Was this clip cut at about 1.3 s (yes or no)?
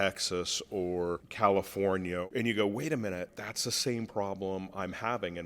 yes